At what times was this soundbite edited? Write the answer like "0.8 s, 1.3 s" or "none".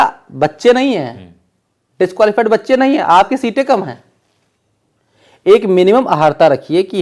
none